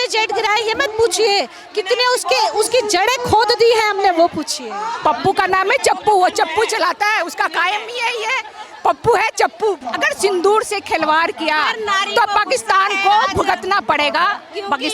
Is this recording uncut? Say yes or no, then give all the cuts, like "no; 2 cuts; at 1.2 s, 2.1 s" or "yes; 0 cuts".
no; 2 cuts; at 4.9 s, 9.8 s